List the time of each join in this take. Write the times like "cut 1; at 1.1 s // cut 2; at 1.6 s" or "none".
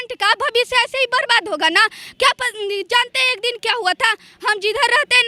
none